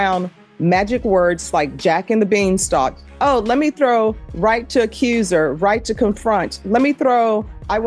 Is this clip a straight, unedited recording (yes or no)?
yes